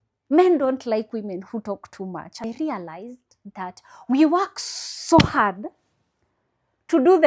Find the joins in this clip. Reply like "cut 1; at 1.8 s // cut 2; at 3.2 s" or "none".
cut 1; at 2.4 s